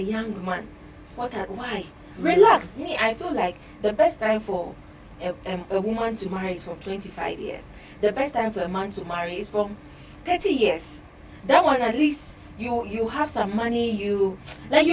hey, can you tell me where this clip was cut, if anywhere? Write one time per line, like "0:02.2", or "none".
none